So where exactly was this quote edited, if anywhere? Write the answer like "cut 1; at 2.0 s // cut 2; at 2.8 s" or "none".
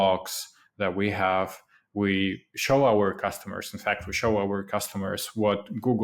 none

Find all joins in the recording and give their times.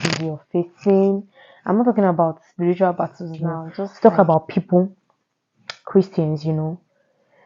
cut 1; at 3.9 s

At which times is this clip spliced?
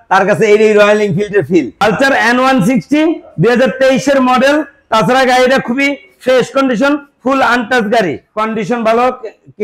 cut 1; at 1.7 s // cut 2; at 8.3 s

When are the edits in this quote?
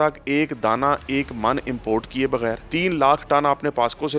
cut 1; at 2.6 s

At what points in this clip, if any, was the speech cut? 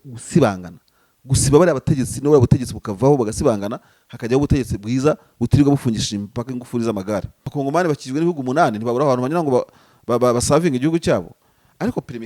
cut 1; at 7.4 s

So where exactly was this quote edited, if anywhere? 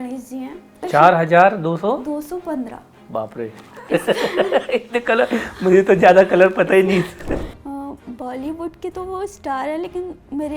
cut 1; at 0.8 s // cut 2; at 7.5 s

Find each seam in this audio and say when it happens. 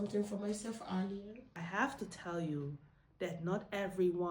cut 1; at 1.4 s

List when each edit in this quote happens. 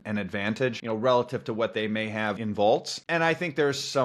cut 1; at 0.8 s // cut 2; at 2.4 s // cut 3; at 2.9 s

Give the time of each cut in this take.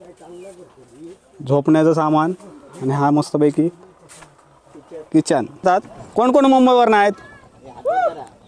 cut 1; at 5.6 s

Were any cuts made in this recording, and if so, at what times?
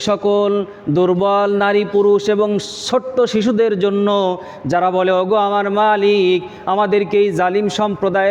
none

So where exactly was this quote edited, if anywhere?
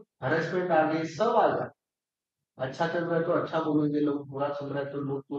none

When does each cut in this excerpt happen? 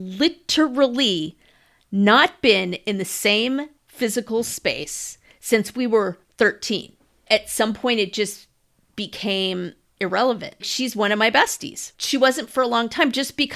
cut 1; at 7.2 s // cut 2; at 9.9 s // cut 3; at 10.7 s // cut 4; at 11.9 s

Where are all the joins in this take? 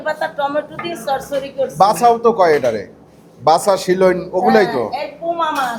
none

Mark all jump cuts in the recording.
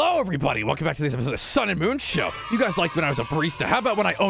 none

